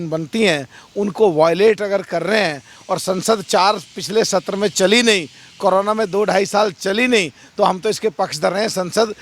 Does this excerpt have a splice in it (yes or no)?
no